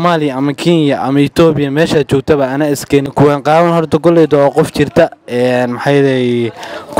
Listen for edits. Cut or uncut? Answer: cut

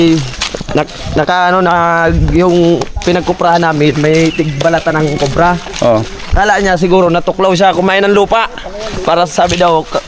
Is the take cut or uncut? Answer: uncut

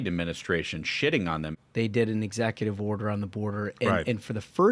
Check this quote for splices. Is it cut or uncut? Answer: cut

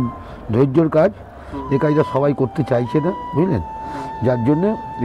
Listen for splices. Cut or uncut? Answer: uncut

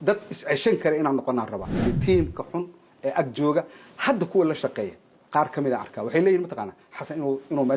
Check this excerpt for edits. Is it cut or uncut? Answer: cut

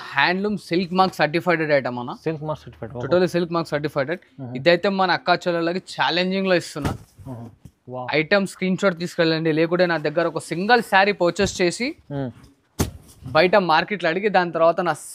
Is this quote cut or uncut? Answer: uncut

